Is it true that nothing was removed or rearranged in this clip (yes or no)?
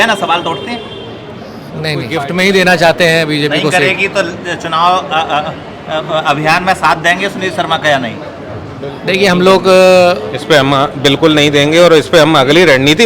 no